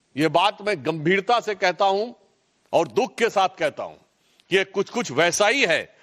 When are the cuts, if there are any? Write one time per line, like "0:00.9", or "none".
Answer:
none